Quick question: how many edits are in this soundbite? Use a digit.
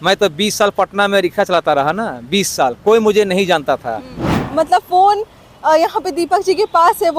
1